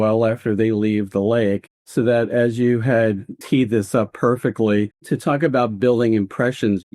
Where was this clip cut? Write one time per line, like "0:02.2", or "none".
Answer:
0:01.7
0:03.3
0:05.0